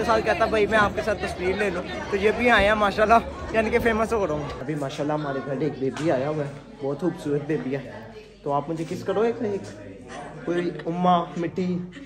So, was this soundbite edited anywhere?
yes; 1 cut; at 4.5 s

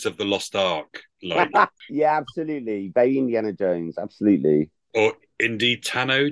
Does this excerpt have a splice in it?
yes; 1 cut; at 1.8 s

